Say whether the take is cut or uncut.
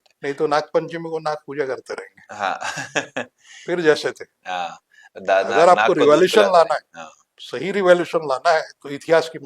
uncut